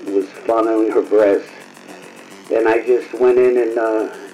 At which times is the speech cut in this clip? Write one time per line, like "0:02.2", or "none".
none